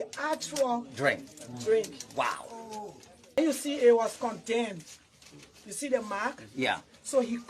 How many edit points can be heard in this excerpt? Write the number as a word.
one